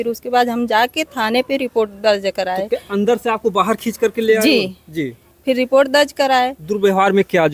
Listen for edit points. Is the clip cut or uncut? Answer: uncut